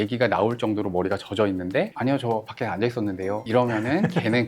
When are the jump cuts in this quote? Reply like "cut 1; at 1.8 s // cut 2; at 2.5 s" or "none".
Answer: cut 1; at 1.9 s // cut 2; at 3.4 s